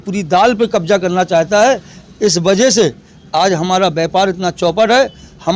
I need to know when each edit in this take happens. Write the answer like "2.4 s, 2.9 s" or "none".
none